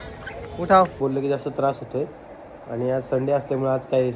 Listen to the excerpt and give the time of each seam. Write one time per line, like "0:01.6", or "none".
0:01.0